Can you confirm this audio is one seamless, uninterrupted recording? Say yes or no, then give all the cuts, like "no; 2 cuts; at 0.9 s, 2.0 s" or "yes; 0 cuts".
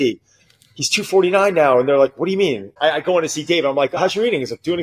no; 1 cut; at 2.7 s